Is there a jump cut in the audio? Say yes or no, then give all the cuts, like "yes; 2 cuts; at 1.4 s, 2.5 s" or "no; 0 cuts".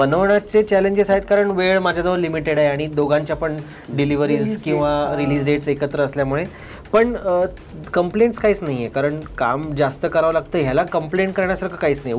no; 0 cuts